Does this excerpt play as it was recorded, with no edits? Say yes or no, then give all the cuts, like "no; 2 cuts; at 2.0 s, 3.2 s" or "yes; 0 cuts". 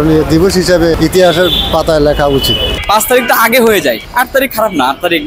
no; 3 cuts; at 1.0 s, 2.7 s, 4.0 s